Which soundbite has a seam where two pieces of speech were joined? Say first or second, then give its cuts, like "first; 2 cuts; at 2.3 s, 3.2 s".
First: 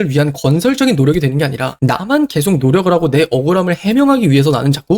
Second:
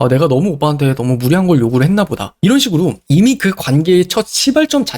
second; 1 cut; at 2.3 s